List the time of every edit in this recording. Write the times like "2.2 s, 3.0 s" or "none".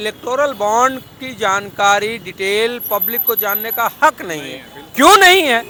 none